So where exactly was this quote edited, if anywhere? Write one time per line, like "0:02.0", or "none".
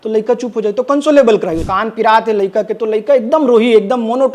0:01.7